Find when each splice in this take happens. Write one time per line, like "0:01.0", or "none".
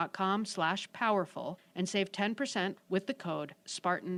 none